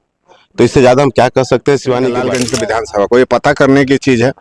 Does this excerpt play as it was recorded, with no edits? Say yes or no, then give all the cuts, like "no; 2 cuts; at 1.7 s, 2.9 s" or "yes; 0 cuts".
no; 1 cut; at 2.4 s